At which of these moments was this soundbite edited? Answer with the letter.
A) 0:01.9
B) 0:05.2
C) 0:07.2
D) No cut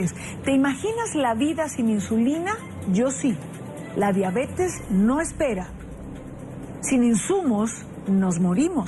B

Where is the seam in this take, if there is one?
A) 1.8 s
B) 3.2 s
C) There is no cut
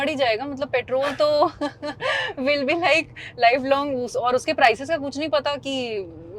C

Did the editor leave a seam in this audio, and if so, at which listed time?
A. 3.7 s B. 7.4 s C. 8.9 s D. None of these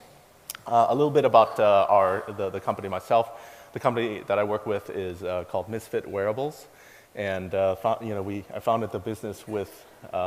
B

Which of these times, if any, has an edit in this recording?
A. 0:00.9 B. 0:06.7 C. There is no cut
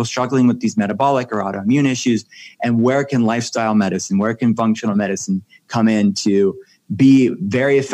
C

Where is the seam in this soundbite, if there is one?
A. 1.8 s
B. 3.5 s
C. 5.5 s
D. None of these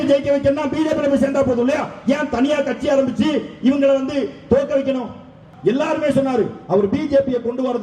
C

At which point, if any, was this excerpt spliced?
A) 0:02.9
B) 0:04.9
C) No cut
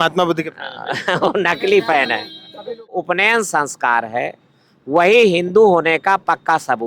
A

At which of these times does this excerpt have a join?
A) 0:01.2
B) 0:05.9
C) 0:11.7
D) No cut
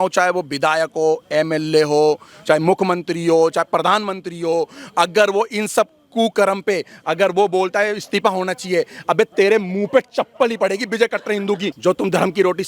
C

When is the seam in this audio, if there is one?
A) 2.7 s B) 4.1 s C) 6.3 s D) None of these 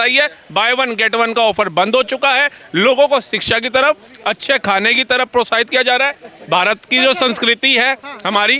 D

